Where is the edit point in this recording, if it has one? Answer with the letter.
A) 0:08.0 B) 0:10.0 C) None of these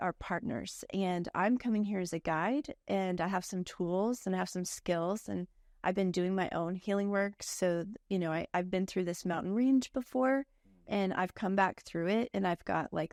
C